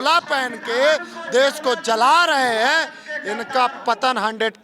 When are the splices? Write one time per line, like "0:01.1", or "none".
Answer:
none